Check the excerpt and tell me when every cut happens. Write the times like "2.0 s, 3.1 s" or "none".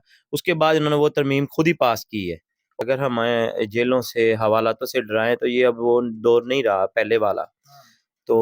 2.8 s